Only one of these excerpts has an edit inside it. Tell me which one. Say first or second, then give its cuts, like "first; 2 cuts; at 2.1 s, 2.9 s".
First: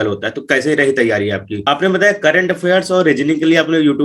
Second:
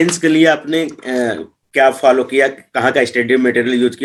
first; 1 cut; at 1.5 s